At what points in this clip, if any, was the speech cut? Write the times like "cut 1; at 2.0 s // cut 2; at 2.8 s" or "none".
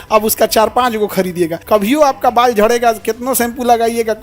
cut 1; at 1.6 s